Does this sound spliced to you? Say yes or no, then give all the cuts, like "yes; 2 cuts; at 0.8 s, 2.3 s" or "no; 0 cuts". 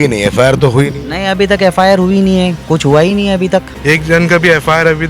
yes; 1 cut; at 3.7 s